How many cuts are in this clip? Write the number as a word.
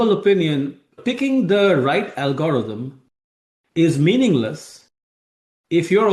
one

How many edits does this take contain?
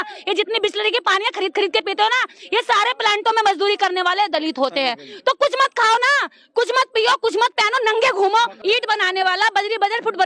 one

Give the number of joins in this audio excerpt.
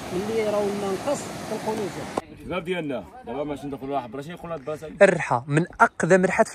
one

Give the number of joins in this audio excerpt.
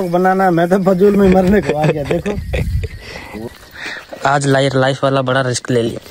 one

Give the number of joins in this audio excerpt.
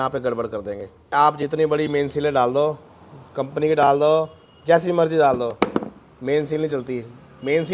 one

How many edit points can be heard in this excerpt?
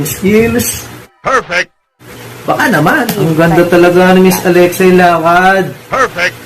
one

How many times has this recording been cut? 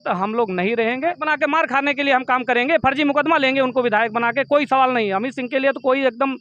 one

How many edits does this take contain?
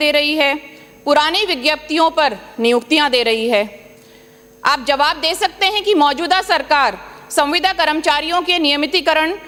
zero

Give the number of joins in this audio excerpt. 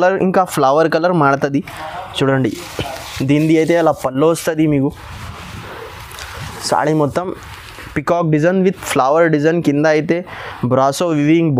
zero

